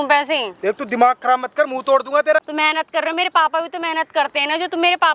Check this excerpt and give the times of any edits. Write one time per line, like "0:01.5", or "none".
0:02.4